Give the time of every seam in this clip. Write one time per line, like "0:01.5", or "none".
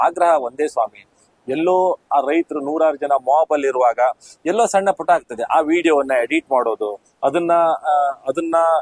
none